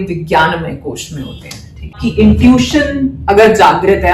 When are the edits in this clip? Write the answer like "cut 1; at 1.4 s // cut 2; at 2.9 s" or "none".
cut 1; at 1.9 s